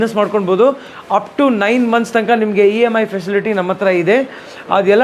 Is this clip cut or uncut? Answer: uncut